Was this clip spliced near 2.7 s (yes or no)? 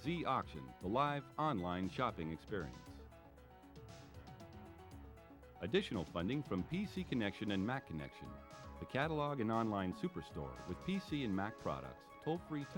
yes